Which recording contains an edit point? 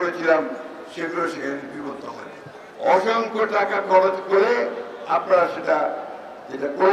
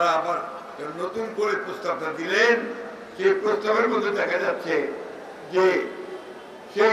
first; 1 cut; at 2.6 s

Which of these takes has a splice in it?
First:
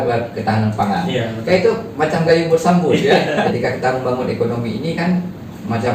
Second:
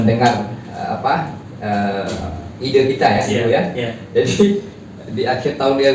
first; 1 cut; at 3.5 s

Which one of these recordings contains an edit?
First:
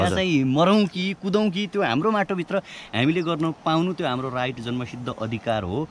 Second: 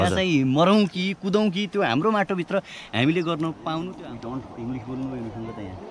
second; 1 cut; at 3.9 s

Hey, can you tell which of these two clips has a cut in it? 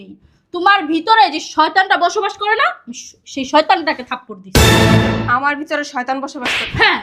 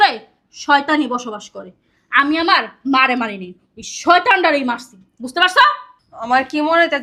first; 2 cuts; at 4.4 s, 5.3 s

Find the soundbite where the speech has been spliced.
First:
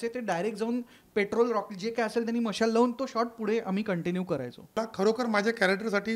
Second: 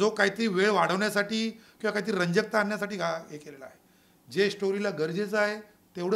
first; 1 cut; at 4.8 s

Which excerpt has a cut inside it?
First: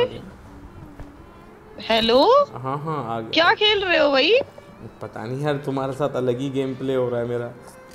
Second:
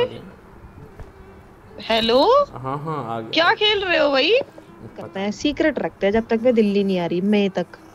second; 1 cut; at 5.1 s

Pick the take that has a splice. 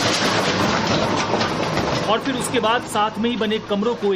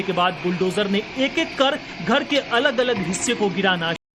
first; 1 cut; at 2.0 s

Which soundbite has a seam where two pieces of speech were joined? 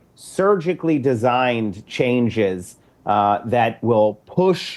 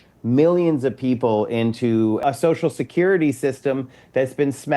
second; 1 cut; at 2.2 s

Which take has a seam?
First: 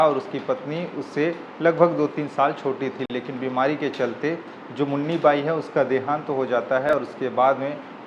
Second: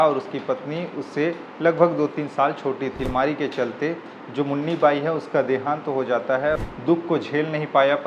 second; 2 cuts; at 3.0 s, 6.5 s

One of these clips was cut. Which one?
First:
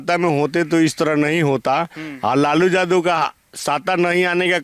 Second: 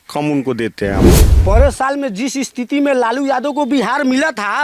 second; 1 cut; at 1.3 s

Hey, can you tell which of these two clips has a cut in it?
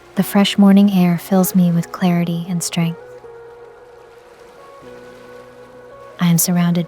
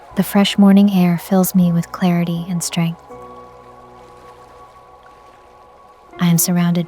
first; 2 cuts; at 3.0 s, 5.5 s

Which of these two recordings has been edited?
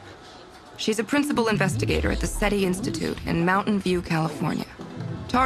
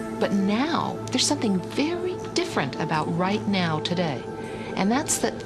first; 1 cut; at 4.3 s

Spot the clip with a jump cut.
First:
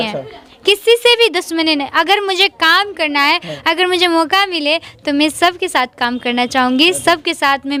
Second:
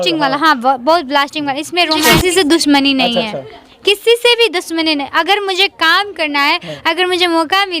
second; 1 cut; at 2.1 s

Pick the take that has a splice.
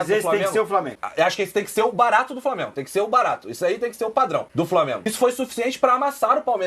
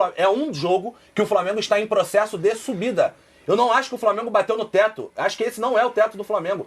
first; 2 cuts; at 1.0 s, 4.7 s

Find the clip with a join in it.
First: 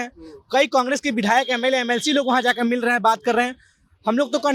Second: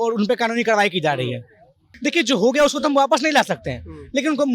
second; 1 cut; at 1.9 s

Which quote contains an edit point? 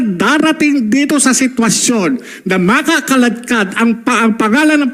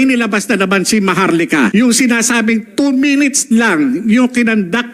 second; 1 cut; at 1.7 s

